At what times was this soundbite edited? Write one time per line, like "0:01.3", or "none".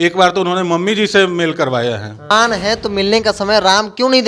0:02.3